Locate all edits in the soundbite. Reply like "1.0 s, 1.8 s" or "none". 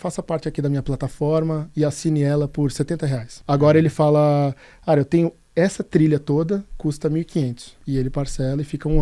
3.4 s, 7.7 s